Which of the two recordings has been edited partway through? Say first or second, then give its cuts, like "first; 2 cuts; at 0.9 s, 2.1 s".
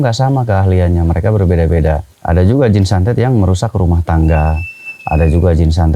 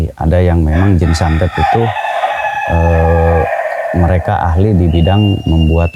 first; 1 cut; at 2.1 s